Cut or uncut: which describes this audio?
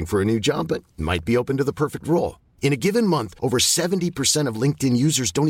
uncut